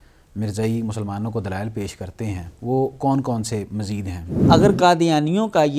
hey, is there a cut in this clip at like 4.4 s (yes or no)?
yes